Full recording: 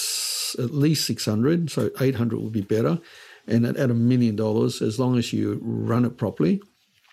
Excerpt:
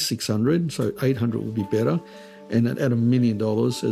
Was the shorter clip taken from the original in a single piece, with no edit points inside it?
yes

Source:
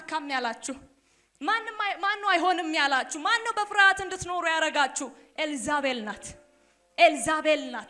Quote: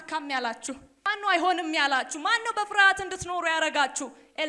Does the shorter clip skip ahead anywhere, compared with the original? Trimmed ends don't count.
yes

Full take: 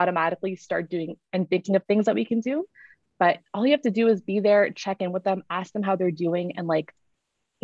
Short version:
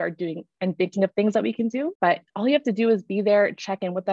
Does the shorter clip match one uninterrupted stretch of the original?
no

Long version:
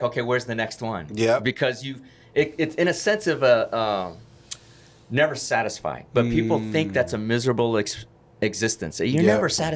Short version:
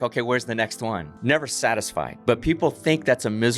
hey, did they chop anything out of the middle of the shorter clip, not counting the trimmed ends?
yes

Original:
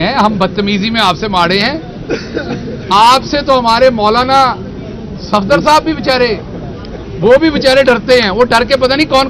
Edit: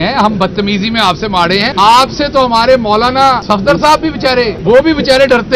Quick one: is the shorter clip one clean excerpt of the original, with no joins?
no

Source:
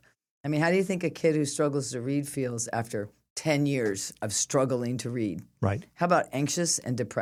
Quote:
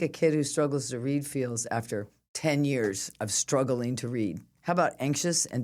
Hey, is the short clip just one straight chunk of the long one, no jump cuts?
no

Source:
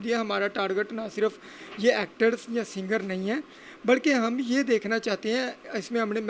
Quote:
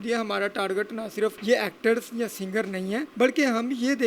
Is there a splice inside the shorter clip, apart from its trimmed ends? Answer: yes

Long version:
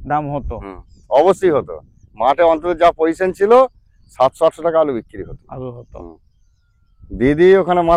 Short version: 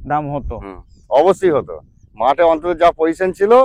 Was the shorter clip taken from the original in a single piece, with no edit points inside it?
yes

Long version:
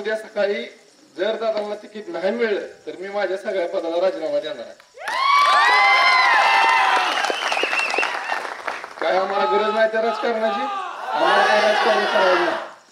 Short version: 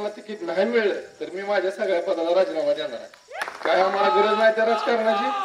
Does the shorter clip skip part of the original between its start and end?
yes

